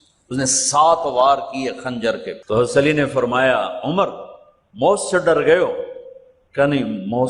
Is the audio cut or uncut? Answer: cut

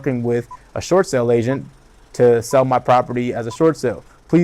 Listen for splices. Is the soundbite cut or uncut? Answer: uncut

